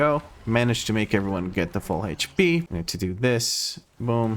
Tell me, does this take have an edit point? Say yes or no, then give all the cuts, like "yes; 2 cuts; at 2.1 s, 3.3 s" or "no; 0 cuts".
yes; 1 cut; at 2.7 s